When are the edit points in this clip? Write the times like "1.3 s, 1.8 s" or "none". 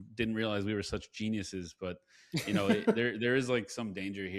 none

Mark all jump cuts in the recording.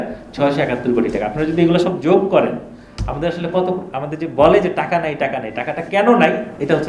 none

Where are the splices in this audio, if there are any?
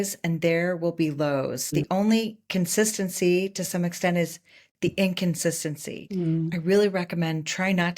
1.8 s, 6.4 s

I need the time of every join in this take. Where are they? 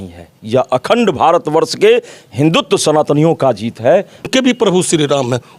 4.3 s

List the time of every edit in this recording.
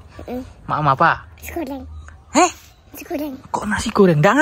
none

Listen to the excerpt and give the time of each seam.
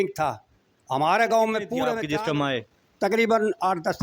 1.9 s

